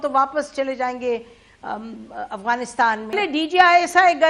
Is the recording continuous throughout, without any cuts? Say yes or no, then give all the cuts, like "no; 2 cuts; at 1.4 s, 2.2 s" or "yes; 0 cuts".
no; 1 cut; at 3.2 s